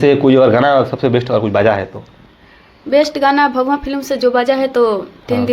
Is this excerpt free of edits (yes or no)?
yes